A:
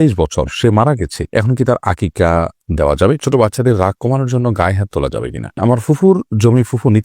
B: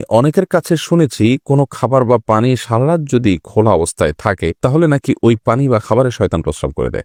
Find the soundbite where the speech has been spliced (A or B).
A